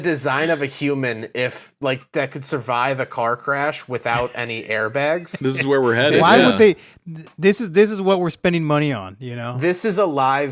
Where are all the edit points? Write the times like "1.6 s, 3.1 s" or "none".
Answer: none